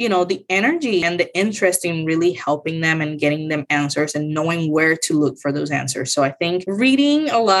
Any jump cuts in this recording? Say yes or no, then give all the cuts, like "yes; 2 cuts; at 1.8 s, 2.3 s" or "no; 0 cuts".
yes; 2 cuts; at 1.0 s, 6.6 s